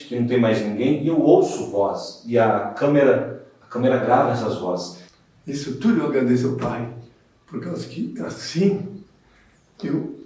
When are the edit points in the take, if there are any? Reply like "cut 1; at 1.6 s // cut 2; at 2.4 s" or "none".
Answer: cut 1; at 4.9 s